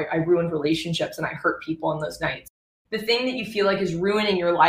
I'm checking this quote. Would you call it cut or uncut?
cut